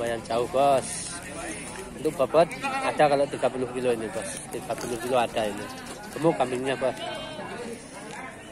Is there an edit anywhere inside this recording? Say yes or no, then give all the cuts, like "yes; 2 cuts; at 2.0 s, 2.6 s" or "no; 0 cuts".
no; 0 cuts